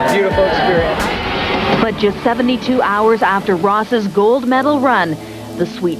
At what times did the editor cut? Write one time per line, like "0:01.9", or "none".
0:01.4